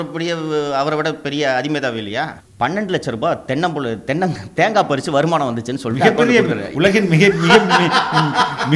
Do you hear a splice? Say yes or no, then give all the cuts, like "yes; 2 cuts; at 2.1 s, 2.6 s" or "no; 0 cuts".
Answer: yes; 1 cut; at 2.4 s